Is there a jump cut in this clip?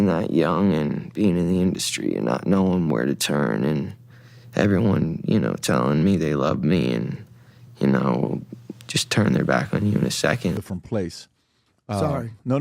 yes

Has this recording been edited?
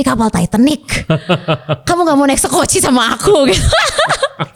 no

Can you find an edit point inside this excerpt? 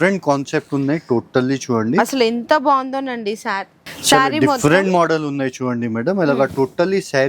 no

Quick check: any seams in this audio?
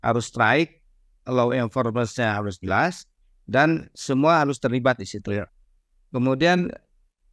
no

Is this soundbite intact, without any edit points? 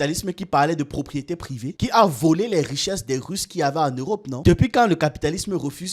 no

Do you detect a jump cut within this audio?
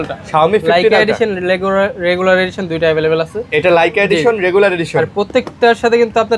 no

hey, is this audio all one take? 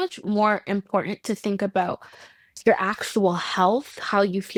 yes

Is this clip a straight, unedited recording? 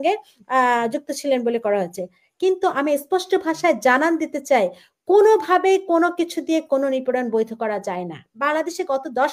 no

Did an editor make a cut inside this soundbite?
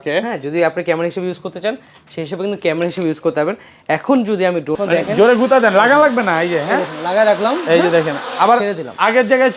yes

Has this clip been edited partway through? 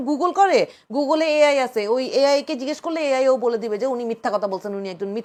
no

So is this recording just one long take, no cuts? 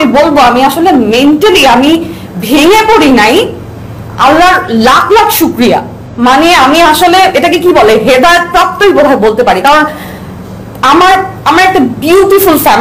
yes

